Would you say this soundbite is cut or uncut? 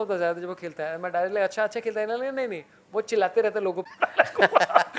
cut